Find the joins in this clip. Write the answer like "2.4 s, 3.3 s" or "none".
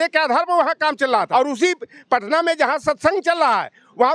1.3 s